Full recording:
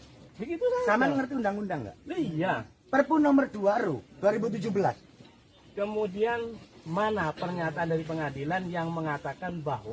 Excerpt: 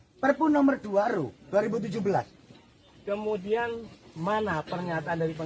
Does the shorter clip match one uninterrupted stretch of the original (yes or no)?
yes